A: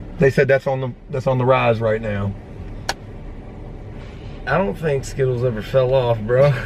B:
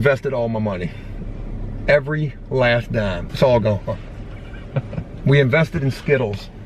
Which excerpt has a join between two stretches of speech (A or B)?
B